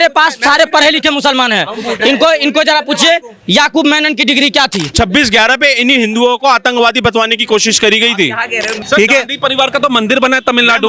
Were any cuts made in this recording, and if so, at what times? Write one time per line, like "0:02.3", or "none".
0:04.9
0:08.8